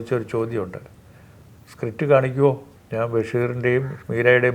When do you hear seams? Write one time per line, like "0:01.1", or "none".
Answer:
0:02.7